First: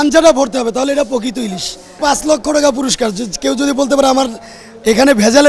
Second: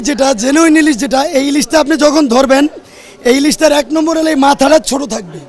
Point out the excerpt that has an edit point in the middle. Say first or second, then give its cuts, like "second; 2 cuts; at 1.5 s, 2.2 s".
first; 1 cut; at 1.9 s